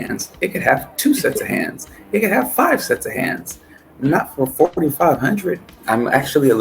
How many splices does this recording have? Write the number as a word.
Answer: one